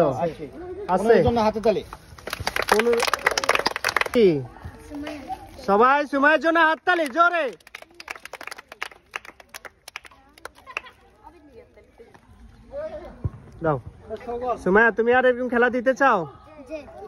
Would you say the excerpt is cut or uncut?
cut